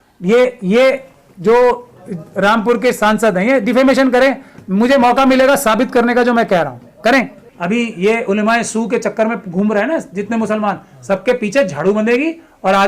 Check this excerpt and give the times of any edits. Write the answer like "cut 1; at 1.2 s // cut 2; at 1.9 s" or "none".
cut 1; at 7.4 s